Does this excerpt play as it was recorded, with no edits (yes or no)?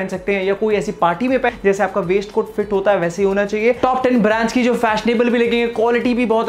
no